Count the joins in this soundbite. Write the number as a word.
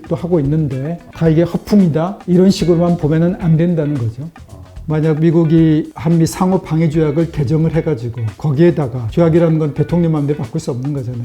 one